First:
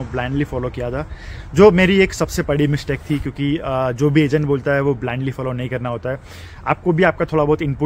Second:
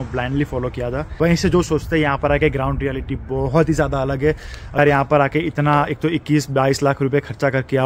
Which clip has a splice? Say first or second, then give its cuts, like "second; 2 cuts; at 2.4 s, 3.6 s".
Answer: second; 2 cuts; at 1.0 s, 4.8 s